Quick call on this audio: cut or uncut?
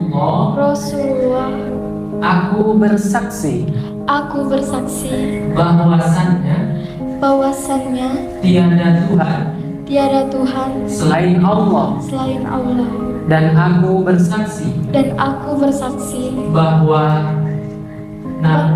uncut